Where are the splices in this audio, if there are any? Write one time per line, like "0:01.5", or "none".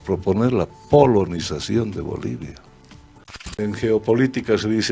0:03.6